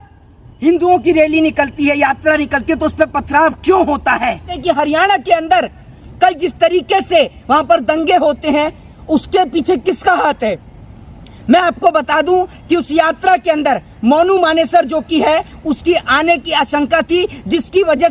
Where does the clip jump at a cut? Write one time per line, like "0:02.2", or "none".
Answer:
0:04.5